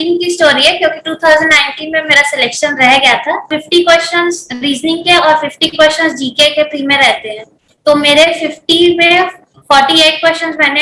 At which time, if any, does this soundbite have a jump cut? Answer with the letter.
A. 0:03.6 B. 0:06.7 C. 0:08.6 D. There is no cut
A